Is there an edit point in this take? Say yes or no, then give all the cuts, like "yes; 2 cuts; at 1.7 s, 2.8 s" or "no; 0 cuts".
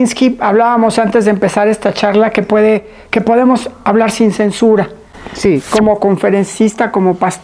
yes; 1 cut; at 5.6 s